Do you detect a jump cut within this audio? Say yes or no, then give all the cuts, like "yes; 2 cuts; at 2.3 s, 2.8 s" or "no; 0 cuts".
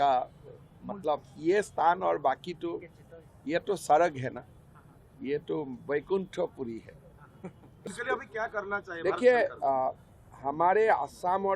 yes; 1 cut; at 7.8 s